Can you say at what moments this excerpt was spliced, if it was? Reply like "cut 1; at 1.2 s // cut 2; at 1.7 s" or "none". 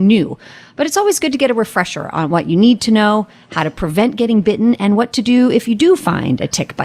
none